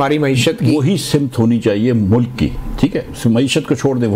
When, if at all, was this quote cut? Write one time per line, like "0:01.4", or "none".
none